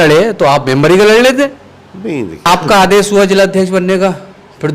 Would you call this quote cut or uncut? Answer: cut